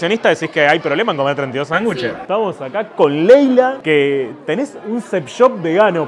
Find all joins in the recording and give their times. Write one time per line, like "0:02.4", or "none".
none